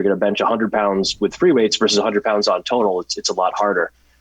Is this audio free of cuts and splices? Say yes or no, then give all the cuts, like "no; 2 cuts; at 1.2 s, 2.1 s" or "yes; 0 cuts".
yes; 0 cuts